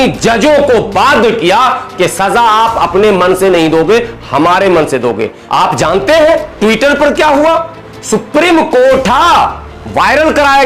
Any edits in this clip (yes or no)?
yes